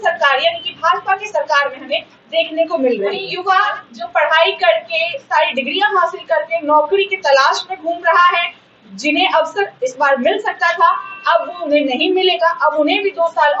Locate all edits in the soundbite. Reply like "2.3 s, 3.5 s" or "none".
3.3 s